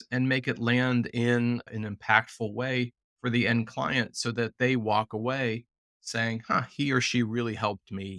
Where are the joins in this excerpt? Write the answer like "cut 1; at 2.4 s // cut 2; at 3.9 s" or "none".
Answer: cut 1; at 1.7 s

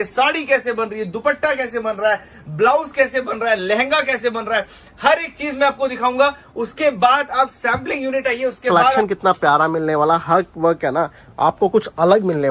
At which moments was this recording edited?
cut 1; at 9.0 s

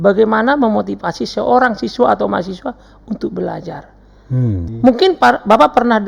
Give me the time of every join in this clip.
cut 1; at 4.7 s

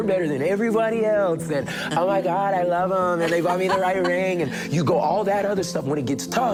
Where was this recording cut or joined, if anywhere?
none

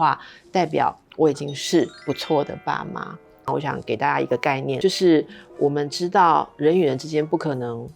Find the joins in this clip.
cut 1; at 3.5 s

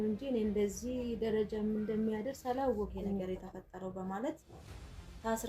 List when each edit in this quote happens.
cut 1; at 3.2 s

